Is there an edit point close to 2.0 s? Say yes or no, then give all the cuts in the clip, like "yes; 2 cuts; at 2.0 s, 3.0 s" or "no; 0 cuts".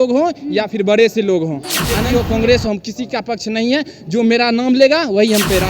yes; 1 cut; at 2.0 s